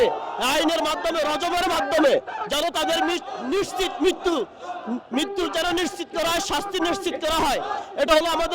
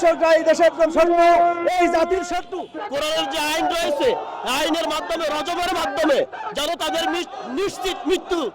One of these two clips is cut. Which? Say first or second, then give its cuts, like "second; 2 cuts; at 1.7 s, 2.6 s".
second; 1 cut; at 2.8 s